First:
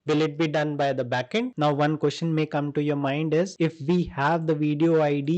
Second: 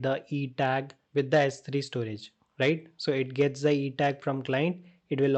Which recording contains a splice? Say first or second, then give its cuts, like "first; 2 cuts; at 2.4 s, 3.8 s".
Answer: first; 1 cut; at 1.5 s